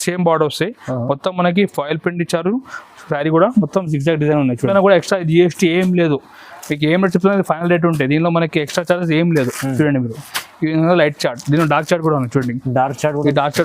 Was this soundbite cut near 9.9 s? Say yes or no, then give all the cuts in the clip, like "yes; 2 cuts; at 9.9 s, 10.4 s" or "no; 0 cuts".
no; 1 cut; at 4.7 s